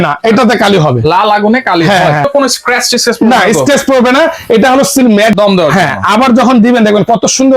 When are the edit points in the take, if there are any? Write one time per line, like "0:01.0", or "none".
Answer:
0:02.3
0:05.3